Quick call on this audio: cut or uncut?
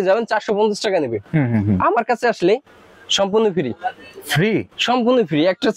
uncut